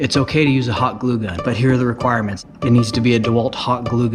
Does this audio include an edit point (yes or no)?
yes